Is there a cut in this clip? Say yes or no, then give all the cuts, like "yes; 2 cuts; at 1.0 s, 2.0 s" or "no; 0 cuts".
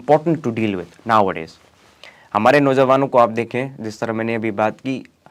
no; 0 cuts